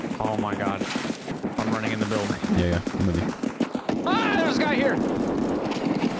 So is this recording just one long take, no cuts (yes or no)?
no